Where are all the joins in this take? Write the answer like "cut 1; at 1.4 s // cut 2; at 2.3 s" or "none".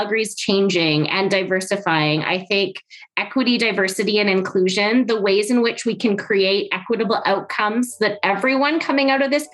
none